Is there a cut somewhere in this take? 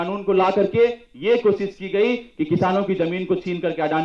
no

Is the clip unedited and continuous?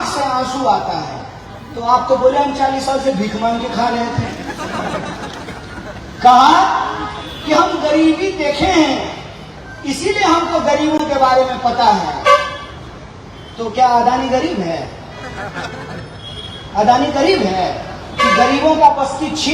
yes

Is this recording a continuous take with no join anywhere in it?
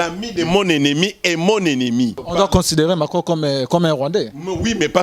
no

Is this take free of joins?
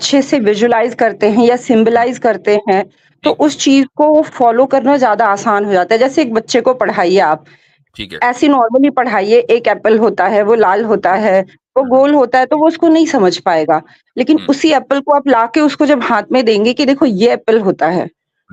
yes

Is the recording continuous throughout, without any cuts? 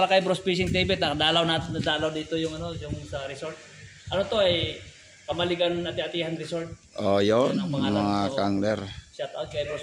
yes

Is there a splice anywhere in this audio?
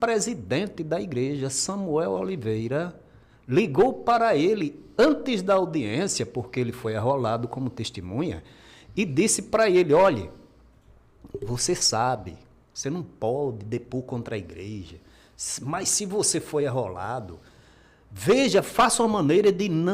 no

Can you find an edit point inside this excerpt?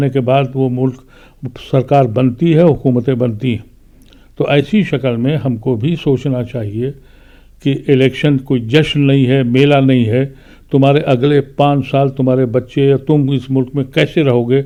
no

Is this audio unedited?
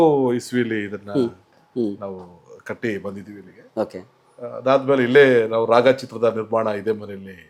yes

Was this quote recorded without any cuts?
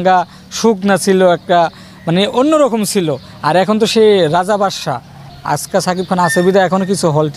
no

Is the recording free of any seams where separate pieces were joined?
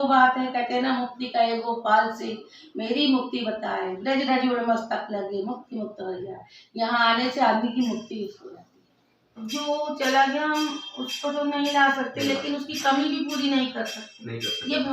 no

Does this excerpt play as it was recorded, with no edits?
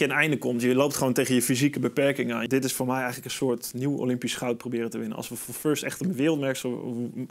no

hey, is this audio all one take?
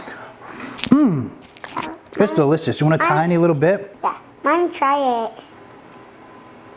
no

